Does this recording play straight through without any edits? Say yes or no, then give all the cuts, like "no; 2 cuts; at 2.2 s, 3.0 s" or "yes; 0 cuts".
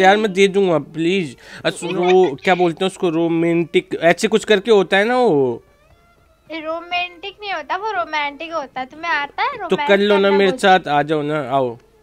no; 1 cut; at 1.9 s